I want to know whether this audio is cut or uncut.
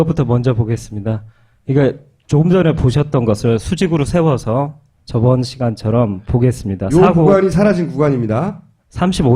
cut